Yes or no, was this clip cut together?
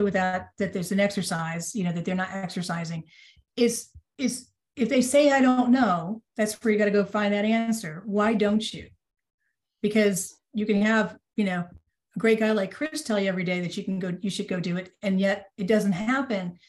no